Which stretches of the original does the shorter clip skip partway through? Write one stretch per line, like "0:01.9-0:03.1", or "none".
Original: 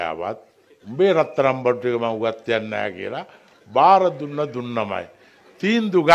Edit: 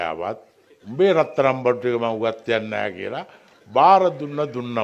none